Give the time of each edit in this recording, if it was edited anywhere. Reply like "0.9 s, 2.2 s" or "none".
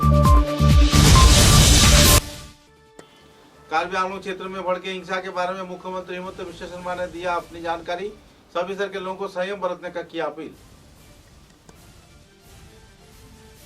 2.3 s